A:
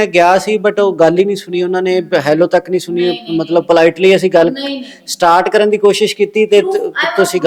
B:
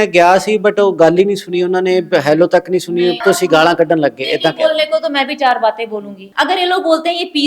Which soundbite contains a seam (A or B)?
B